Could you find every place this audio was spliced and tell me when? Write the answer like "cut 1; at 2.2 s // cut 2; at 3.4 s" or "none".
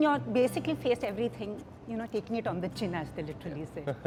none